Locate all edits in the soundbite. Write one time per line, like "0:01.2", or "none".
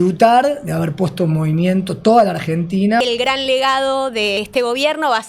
0:03.0
0:04.4